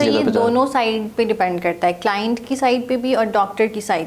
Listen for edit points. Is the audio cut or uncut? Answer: uncut